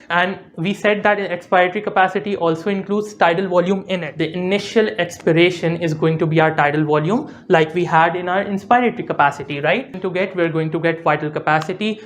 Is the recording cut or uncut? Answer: cut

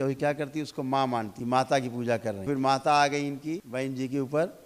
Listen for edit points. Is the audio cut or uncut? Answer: cut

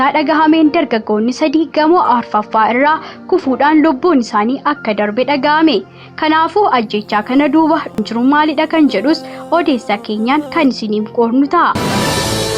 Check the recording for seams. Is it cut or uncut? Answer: cut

